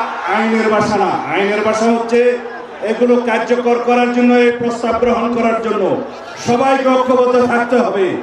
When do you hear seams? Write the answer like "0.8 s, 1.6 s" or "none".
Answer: none